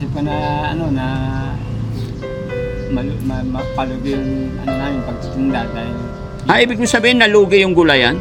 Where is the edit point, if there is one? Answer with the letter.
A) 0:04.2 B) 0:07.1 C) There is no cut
C